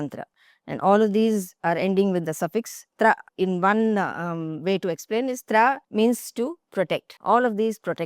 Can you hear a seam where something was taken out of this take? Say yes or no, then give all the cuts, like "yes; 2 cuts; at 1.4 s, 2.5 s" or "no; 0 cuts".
yes; 3 cuts; at 3.3 s, 5.8 s, 7.1 s